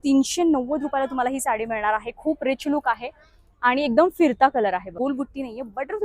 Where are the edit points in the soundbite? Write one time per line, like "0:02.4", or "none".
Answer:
0:04.9